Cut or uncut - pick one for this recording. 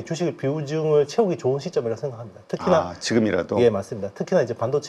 uncut